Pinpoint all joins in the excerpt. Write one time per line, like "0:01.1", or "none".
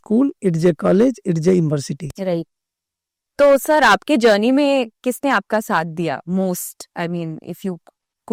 none